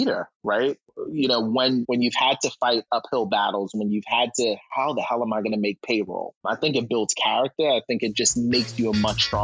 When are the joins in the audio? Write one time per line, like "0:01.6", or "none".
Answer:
0:01.8
0:06.4